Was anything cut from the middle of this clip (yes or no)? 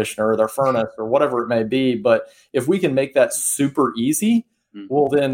no